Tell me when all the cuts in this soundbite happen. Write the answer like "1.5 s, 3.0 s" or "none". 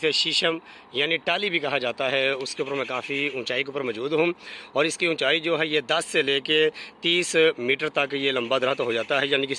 none